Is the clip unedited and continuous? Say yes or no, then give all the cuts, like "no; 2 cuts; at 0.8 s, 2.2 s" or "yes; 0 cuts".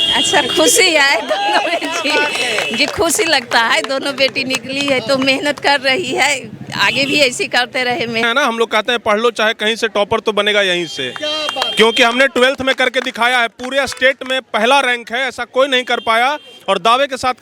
no; 1 cut; at 8.2 s